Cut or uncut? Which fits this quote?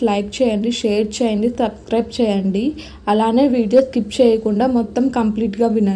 uncut